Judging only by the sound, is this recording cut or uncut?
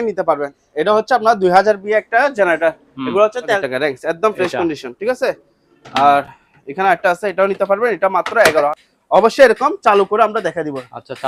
cut